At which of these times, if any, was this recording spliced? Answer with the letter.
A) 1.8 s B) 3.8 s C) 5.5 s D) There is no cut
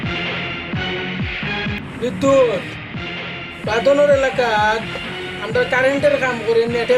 A